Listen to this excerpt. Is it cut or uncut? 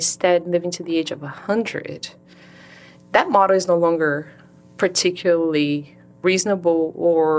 cut